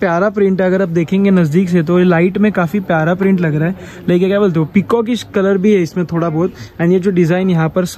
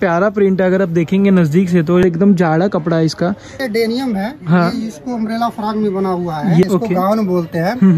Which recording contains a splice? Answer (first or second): second